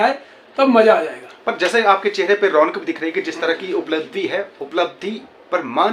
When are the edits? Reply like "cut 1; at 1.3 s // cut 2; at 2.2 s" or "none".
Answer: none